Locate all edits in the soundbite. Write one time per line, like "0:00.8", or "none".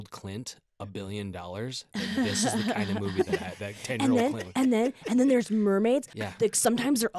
none